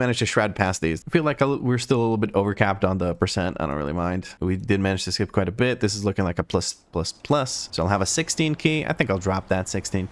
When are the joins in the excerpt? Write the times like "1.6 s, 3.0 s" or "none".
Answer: none